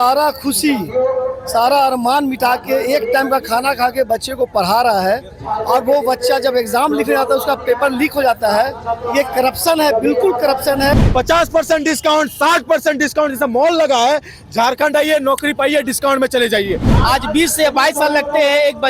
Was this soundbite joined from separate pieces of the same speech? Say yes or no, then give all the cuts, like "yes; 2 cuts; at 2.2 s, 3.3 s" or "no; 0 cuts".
yes; 2 cuts; at 10.9 s, 16.9 s